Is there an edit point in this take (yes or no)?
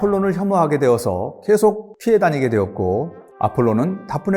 yes